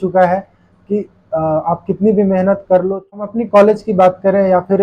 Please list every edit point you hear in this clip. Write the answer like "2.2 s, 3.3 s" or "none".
3.2 s